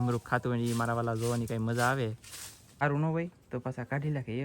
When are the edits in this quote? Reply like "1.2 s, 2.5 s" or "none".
2.8 s